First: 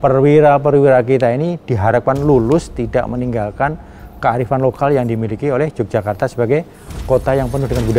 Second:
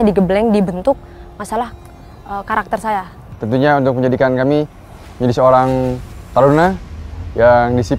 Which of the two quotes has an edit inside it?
second; 1 cut; at 3.2 s

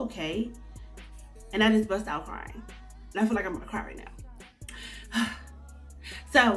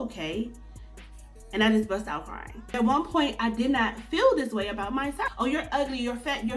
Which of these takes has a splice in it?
second; 2 cuts; at 2.8 s, 5.3 s

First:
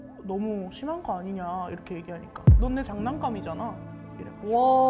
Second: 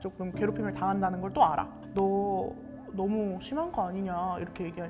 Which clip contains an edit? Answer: second; 1 cut; at 1.8 s

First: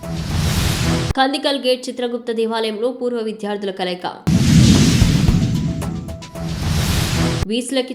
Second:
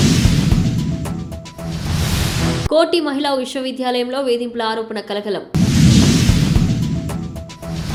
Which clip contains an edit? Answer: first; 1 cut; at 0.9 s

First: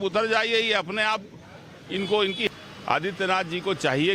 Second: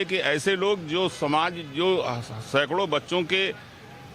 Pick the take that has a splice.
first; 1 cut; at 2.5 s

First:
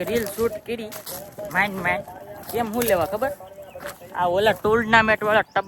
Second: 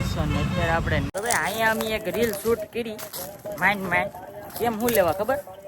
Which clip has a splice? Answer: second; 1 cut; at 1.1 s

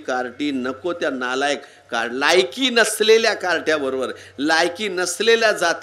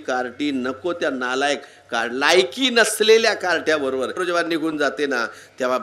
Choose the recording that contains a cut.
second; 1 cut; at 4.2 s

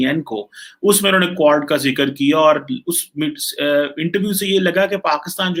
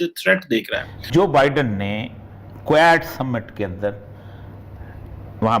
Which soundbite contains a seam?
second; 1 cut; at 0.9 s

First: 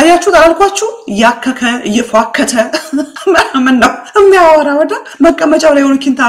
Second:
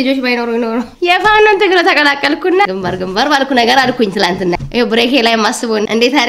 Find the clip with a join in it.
second; 2 cuts; at 0.9 s, 2.7 s

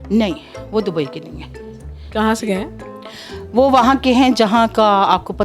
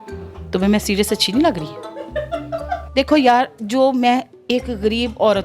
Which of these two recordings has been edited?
second; 1 cut; at 2.9 s

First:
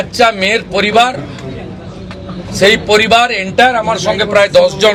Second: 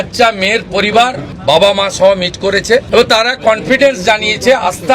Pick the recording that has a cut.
second; 2 cuts; at 1.3 s, 2.9 s

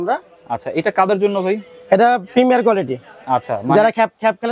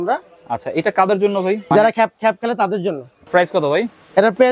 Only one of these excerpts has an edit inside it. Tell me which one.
second; 2 cuts; at 1.6 s, 3.1 s

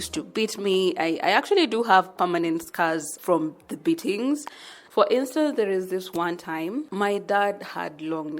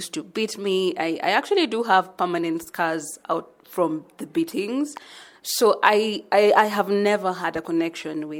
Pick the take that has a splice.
first; 3 cuts; at 3.1 s, 4.7 s, 6.9 s

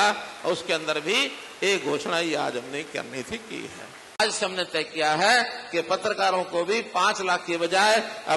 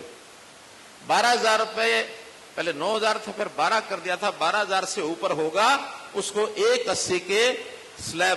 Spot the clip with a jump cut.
first; 1 cut; at 4.2 s

